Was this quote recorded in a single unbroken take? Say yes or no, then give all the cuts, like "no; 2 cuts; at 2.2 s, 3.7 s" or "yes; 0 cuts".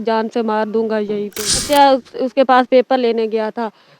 no; 1 cut; at 1.6 s